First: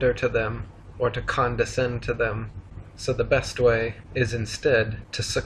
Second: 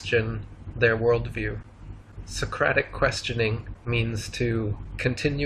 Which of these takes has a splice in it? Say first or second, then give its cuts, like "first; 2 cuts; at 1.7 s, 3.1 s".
second; 1 cut; at 4.2 s